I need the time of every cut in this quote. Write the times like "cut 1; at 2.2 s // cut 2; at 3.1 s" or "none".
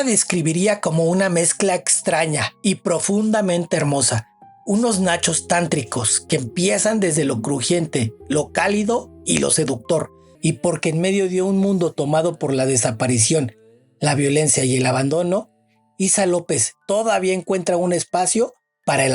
cut 1; at 10.2 s